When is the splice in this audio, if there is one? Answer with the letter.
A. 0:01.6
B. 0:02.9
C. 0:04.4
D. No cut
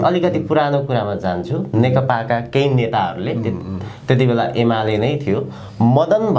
D